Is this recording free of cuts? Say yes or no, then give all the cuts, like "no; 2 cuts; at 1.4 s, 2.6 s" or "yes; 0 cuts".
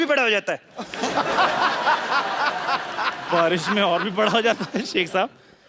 yes; 0 cuts